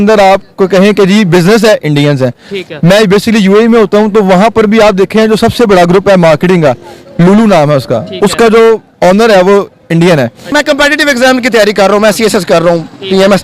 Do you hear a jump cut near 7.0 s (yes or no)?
no